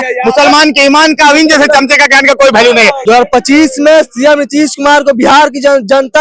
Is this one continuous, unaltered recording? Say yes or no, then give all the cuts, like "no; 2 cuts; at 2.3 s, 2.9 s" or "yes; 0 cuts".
no; 1 cut; at 3.0 s